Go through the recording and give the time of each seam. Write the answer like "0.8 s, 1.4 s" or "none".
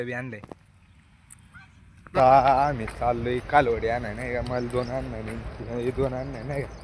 2.1 s

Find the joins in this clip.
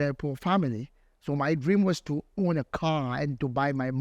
none

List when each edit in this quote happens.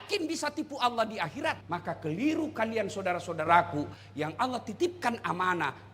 1.6 s

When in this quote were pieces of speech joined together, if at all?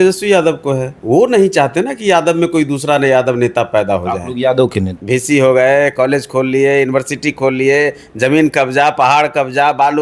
0.9 s, 4.9 s

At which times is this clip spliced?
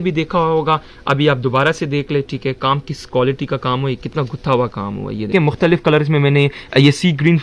5.3 s

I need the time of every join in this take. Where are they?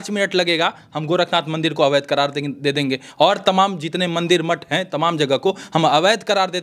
none

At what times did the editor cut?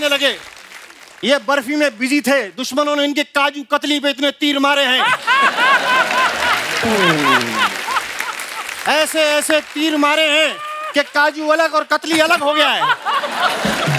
none

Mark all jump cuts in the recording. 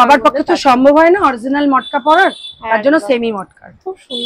none

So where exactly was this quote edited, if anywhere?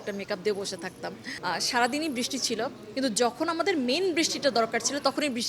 1.3 s

